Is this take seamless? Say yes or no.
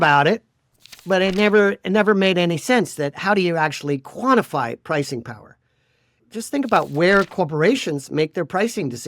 no